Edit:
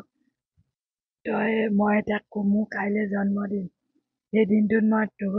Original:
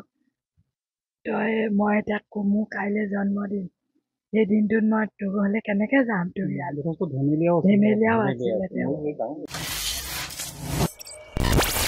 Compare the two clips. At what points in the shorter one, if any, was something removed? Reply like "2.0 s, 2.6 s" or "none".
none